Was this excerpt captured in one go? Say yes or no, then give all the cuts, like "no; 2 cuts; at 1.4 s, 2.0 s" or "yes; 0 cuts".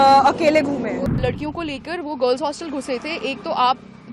no; 1 cut; at 1.1 s